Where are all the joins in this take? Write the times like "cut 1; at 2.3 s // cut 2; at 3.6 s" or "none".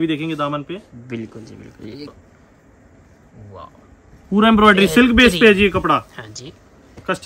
cut 1; at 2.1 s